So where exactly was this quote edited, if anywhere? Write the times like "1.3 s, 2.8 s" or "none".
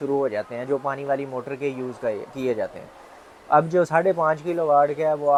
none